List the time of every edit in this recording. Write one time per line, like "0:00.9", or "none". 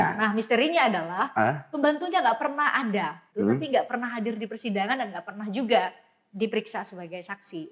0:03.2